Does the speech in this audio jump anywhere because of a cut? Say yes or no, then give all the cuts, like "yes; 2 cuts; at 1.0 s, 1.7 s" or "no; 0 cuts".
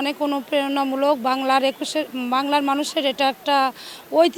no; 0 cuts